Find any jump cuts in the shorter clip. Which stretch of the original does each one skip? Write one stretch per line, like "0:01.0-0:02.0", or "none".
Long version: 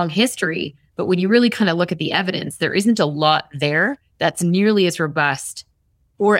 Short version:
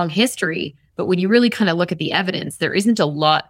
none